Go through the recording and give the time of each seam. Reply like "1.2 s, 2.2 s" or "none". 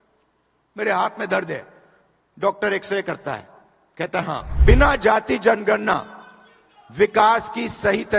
4.4 s